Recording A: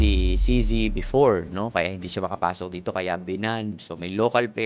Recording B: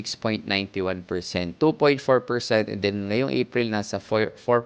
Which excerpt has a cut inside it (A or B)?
B